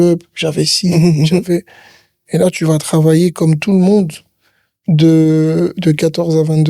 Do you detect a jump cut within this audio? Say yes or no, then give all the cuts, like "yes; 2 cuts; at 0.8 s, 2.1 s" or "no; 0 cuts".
no; 0 cuts